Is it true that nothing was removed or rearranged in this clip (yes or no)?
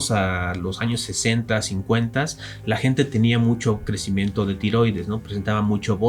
yes